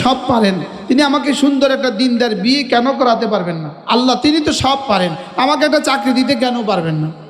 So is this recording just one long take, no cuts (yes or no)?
no